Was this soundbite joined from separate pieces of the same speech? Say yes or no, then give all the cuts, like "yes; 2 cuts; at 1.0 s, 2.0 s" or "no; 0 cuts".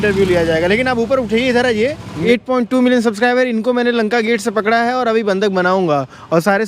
yes; 1 cut; at 2.1 s